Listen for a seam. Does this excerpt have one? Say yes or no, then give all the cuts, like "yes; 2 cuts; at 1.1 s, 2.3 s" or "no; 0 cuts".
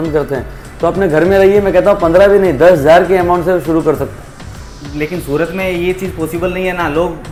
no; 0 cuts